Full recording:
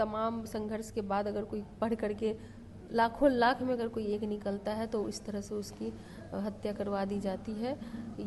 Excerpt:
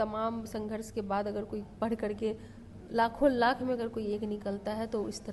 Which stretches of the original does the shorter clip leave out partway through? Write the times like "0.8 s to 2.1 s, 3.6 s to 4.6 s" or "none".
none